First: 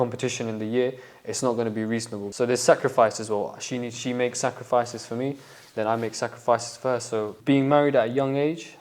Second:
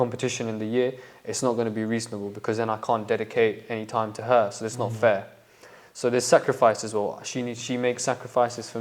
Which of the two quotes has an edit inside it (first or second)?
first